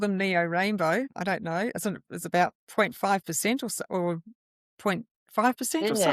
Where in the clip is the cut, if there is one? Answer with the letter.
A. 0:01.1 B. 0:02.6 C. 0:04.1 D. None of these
A